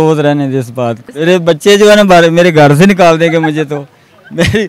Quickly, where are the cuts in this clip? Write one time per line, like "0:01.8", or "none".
0:01.1